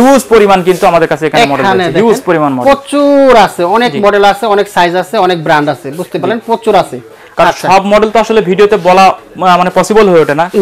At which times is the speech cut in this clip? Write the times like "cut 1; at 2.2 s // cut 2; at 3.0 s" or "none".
none